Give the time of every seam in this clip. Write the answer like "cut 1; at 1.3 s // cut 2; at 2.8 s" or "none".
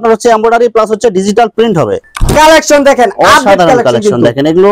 cut 1; at 2.0 s